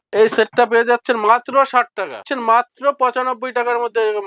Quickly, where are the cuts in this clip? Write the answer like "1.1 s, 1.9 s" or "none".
2.3 s